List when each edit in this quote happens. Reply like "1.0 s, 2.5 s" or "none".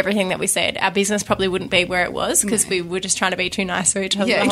none